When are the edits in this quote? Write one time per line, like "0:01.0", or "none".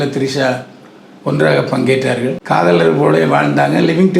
0:02.4